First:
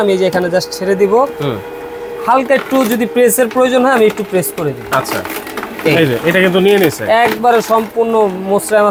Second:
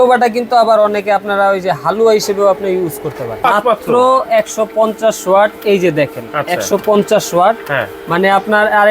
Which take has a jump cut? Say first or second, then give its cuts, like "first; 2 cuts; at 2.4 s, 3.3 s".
second; 1 cut; at 3.4 s